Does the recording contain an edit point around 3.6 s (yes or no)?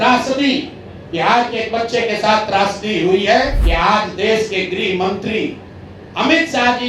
yes